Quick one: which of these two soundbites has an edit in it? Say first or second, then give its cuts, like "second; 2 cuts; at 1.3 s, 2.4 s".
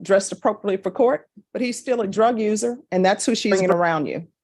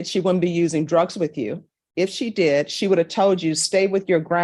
first; 1 cut; at 3.5 s